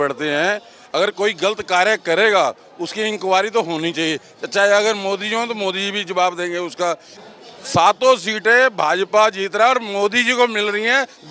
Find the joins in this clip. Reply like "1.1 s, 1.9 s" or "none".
7.1 s